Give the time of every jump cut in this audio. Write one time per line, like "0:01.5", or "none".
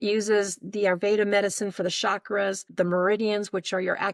0:02.7